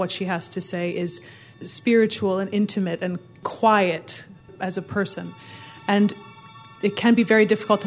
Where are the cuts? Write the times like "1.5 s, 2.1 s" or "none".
1.5 s, 3.3 s, 4.5 s, 6.6 s